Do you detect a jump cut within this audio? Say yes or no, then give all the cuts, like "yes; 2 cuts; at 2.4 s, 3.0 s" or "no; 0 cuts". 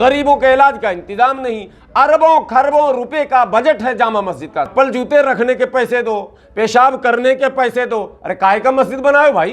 yes; 1 cut; at 4.7 s